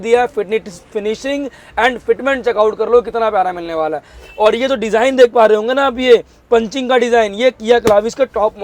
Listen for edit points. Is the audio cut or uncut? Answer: uncut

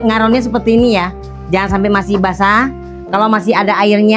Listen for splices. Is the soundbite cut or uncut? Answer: uncut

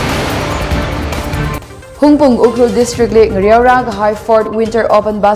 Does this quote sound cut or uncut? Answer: cut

